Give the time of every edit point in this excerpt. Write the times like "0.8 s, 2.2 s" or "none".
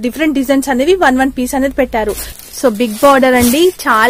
2.3 s